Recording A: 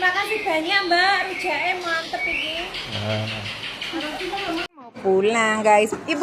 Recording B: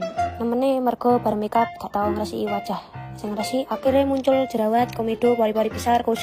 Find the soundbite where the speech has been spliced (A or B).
A